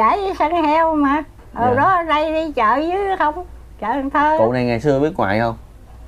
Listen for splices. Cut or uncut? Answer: uncut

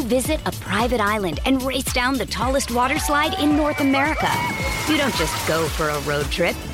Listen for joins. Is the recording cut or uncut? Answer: uncut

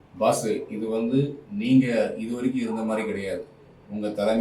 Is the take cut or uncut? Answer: uncut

